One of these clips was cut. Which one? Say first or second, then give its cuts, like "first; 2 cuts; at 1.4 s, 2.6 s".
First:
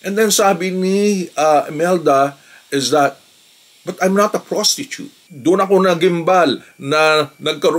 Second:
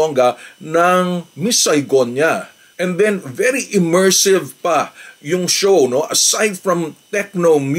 first; 1 cut; at 5.3 s